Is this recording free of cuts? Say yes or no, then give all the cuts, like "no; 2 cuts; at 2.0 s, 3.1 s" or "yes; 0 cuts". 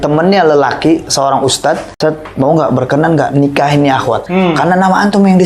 no; 2 cuts; at 1.9 s, 4.2 s